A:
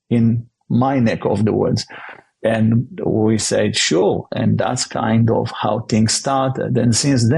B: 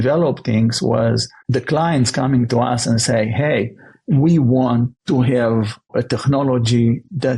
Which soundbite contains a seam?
B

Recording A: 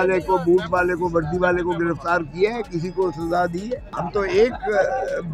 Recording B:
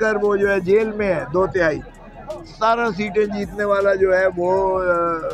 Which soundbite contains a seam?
A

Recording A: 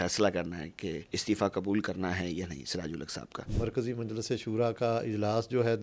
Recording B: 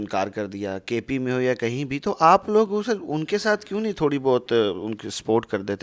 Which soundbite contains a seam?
A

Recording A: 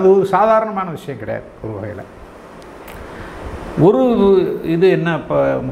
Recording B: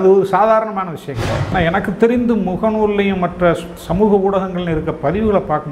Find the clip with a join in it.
B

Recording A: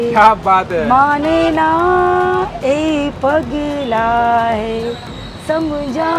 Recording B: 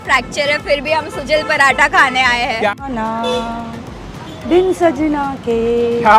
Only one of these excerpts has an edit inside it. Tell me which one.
B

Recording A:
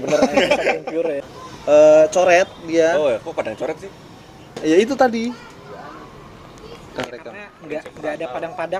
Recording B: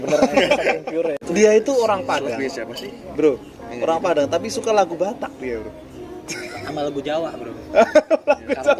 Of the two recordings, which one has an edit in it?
B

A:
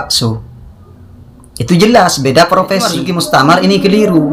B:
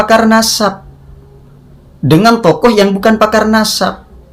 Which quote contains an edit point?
A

